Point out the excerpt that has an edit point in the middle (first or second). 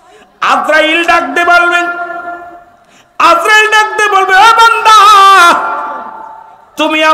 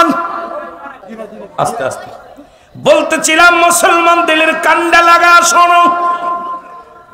second